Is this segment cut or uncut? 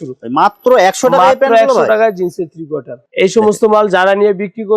cut